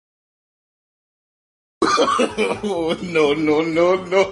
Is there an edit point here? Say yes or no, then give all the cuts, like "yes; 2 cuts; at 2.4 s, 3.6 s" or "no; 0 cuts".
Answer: no; 0 cuts